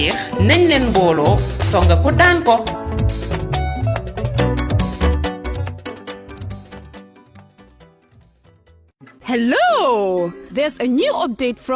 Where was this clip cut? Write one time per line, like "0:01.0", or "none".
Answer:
0:08.8